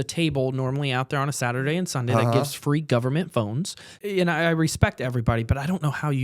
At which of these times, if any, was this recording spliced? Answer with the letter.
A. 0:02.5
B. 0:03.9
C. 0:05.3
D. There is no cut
B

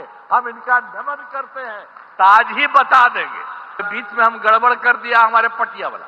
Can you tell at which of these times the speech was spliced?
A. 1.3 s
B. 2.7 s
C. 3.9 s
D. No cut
C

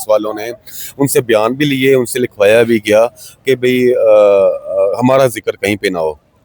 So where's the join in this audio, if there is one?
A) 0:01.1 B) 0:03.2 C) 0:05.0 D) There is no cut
D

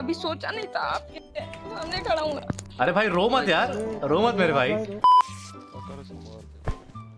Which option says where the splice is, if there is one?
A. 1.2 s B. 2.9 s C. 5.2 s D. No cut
C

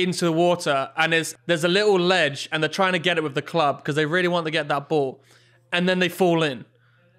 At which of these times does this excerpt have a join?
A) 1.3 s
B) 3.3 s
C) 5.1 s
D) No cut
A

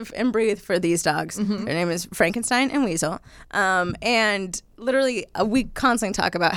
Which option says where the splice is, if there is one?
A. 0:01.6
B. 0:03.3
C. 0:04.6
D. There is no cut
D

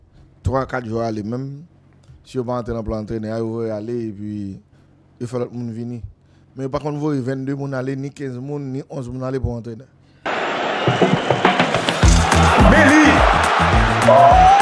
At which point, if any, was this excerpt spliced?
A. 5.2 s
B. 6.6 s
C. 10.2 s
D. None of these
C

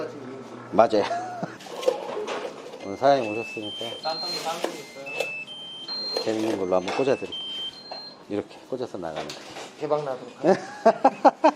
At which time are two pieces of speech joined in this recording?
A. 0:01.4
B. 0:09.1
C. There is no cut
A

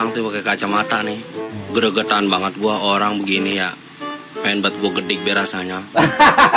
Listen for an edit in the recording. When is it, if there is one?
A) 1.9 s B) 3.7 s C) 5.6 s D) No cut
D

